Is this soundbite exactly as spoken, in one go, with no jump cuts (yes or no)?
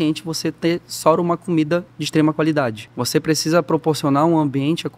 no